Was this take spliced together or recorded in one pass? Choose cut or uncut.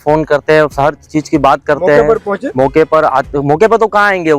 uncut